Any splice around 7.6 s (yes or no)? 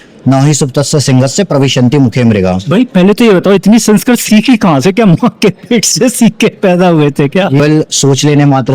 yes